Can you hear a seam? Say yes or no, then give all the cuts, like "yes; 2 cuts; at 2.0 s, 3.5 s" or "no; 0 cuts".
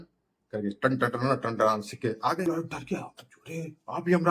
yes; 1 cut; at 2.5 s